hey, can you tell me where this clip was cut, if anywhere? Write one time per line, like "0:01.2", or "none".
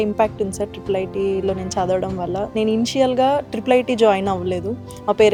none